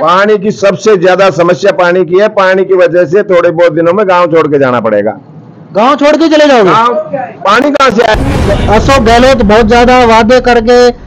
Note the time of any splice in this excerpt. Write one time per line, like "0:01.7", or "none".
0:08.2